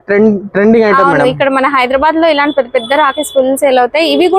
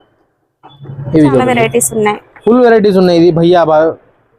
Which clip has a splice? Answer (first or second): second